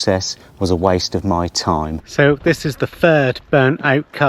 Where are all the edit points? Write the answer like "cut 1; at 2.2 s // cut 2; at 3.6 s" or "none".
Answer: cut 1; at 2.0 s